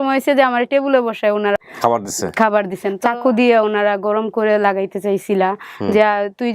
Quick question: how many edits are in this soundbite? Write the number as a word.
two